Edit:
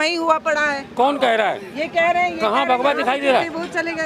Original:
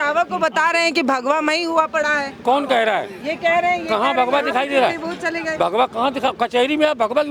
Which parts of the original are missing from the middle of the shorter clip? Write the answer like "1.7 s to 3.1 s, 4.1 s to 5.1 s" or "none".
none